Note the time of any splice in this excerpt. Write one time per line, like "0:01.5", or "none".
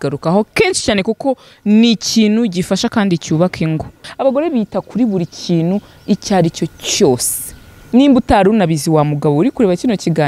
0:04.0